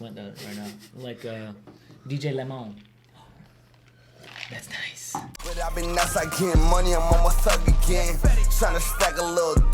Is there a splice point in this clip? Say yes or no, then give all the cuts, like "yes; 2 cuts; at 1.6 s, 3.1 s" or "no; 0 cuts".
yes; 1 cut; at 5.3 s